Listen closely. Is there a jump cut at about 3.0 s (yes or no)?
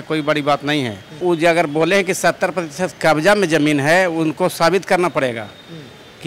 no